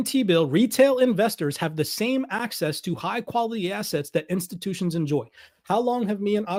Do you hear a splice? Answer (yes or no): no